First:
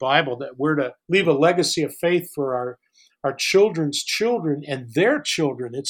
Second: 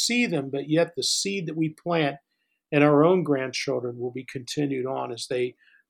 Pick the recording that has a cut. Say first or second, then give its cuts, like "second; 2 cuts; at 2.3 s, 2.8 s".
first; 1 cut; at 1.0 s